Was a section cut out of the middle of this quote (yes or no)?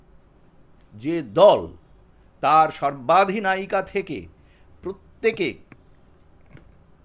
no